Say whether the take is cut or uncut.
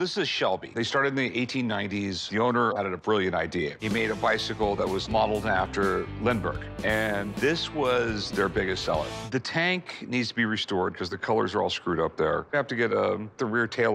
uncut